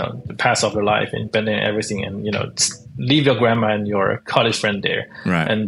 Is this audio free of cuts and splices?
yes; 0 cuts

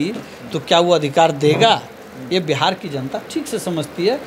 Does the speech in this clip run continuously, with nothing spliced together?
yes; 0 cuts

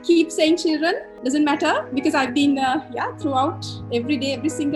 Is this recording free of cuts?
no; 1 cut; at 1.1 s

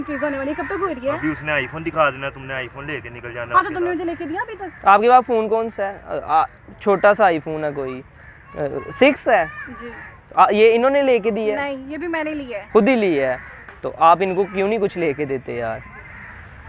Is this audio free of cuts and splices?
yes; 0 cuts

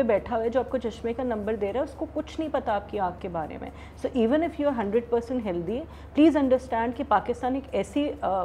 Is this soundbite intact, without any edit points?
yes; 0 cuts

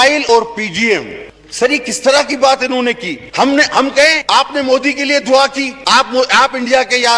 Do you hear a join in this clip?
yes; 1 cut; at 1.2 s

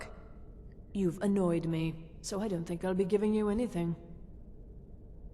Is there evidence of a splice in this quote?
yes; 1 cut; at 4.1 s

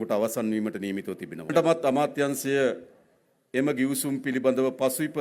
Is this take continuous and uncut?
no; 1 cut; at 1.5 s

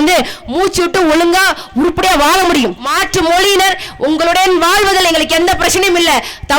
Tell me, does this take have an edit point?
yes; 1 cut; at 2.9 s

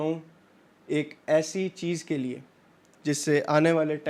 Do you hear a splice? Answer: no; 0 cuts

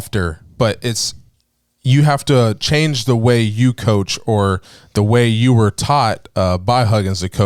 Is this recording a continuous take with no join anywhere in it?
yes; 0 cuts

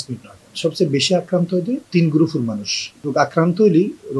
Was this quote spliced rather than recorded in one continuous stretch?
yes; 1 cut; at 3.0 s

